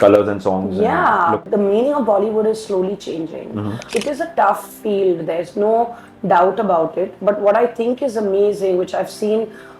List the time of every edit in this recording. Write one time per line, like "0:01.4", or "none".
0:01.4
0:03.8